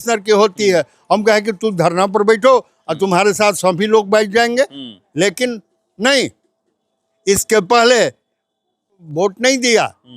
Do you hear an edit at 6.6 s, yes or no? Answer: no